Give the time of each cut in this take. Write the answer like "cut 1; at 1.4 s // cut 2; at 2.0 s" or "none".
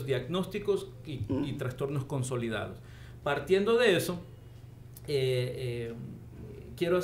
none